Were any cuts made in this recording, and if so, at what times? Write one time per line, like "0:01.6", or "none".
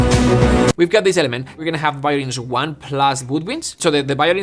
0:01.6